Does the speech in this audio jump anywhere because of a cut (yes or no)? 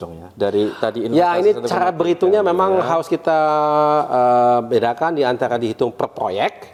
no